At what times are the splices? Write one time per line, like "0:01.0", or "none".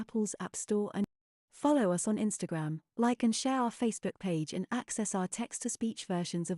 0:01.0